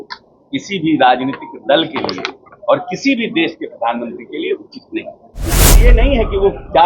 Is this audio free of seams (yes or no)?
no